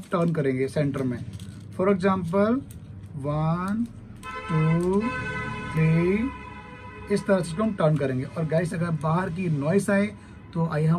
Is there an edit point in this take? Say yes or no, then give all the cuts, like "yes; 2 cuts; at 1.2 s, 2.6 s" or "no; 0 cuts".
no; 0 cuts